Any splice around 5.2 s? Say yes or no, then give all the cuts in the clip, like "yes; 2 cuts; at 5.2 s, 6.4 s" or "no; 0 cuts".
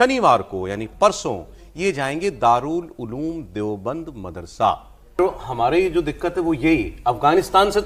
yes; 1 cut; at 5.2 s